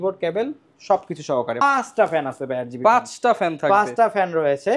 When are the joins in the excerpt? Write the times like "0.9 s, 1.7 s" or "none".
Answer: 1.6 s